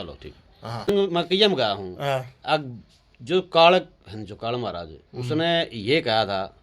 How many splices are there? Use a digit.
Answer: 1